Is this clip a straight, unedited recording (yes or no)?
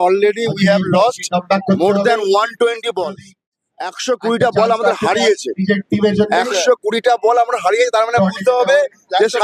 yes